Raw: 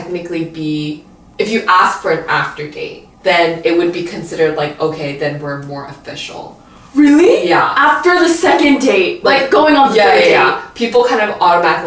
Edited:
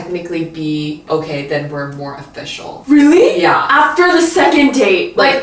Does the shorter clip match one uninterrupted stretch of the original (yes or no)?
no